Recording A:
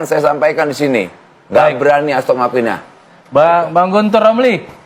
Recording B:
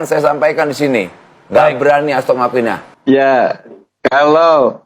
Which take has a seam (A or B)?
B